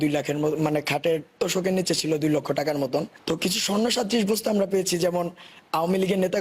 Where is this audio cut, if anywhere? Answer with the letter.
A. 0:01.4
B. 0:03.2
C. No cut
B